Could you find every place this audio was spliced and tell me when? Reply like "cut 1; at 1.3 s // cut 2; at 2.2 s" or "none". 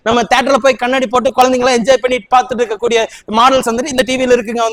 none